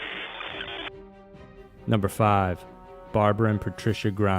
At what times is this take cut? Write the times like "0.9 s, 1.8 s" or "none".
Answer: 3.4 s